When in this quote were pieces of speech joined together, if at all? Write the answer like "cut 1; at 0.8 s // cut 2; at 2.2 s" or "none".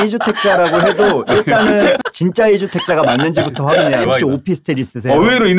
cut 1; at 2.0 s // cut 2; at 4.0 s